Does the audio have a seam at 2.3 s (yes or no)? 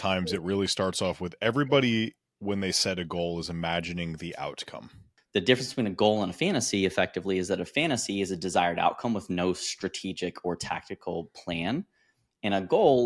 no